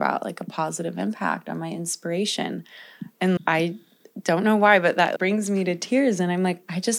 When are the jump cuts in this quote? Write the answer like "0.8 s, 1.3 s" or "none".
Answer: 3.4 s, 5.1 s